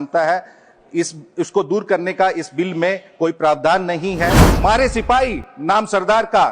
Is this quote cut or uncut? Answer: cut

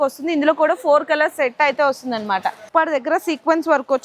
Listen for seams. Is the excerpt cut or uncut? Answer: cut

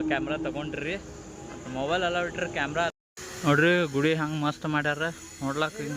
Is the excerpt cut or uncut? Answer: cut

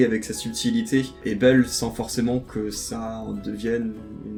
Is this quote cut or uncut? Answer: uncut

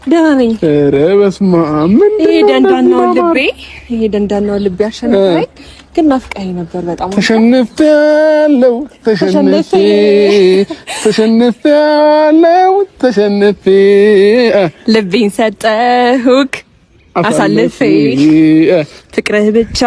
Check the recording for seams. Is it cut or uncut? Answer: uncut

